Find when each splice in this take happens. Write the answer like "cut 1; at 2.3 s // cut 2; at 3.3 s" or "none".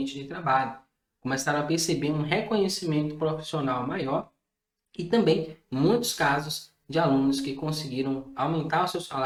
none

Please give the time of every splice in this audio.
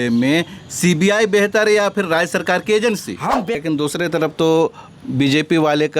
cut 1; at 3.5 s

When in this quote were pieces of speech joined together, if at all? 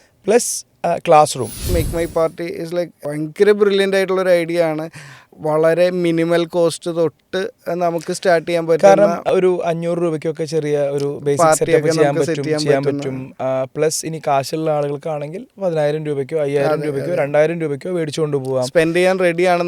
cut 1; at 1.7 s

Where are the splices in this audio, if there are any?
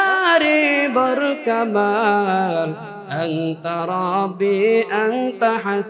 none

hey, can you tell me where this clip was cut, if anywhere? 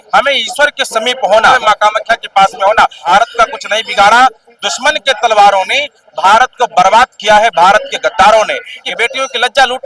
cut 1; at 1.6 s // cut 2; at 3.0 s // cut 3; at 8.8 s

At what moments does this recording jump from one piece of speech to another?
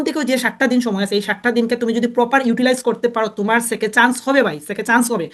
none

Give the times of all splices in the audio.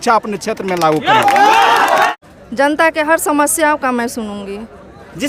cut 1; at 2.1 s

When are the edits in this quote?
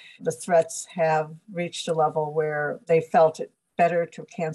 cut 1; at 2.8 s

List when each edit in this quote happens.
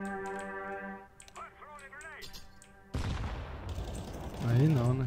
none

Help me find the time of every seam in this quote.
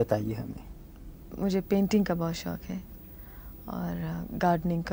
none

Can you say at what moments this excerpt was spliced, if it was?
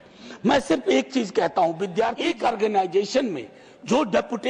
cut 1; at 2.2 s

